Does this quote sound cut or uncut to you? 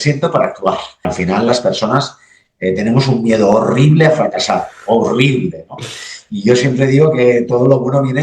cut